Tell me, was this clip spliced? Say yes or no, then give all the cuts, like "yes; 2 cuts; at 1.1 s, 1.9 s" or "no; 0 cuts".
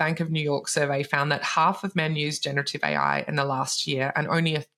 no; 0 cuts